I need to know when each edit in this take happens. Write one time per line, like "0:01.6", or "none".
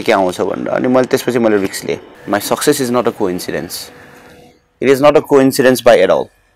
0:02.1